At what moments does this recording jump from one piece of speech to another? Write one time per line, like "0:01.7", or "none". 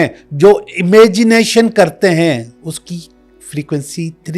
0:02.5